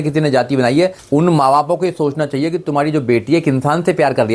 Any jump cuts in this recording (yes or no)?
yes